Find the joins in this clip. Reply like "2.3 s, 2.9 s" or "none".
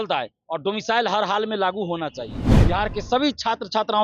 2.5 s